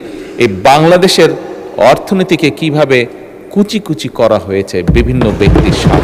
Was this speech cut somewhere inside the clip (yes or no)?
no